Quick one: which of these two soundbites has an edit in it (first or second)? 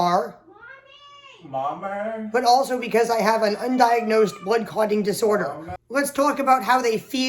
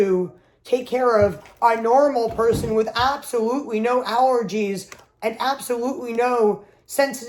first